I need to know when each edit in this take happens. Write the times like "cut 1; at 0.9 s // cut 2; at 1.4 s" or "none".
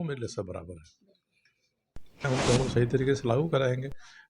cut 1; at 2.3 s